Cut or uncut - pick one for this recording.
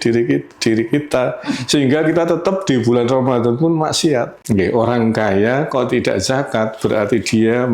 cut